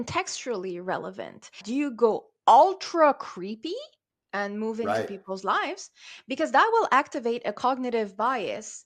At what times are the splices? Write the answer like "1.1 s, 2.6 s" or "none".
1.6 s